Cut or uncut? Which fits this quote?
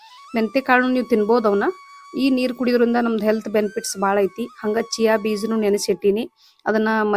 uncut